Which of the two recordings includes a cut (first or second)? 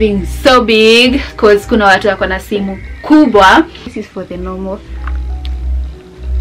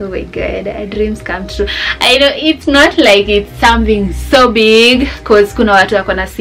first